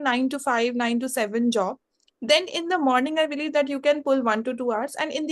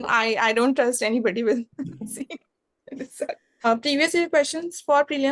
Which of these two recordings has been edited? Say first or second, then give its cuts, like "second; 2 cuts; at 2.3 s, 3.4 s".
second; 1 cut; at 3.7 s